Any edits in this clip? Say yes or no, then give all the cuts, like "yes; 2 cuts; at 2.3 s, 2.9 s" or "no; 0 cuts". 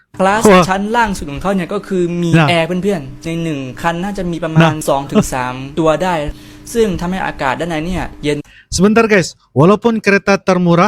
no; 0 cuts